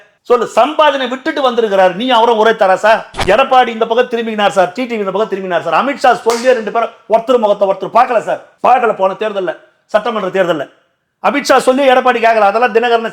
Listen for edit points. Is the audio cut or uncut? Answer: cut